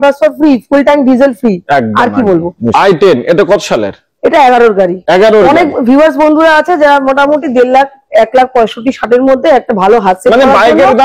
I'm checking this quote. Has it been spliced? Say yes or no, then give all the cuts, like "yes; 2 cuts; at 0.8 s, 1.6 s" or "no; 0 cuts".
no; 0 cuts